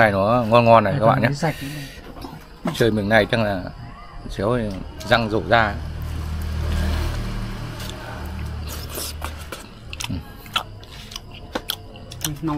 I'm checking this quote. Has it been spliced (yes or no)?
no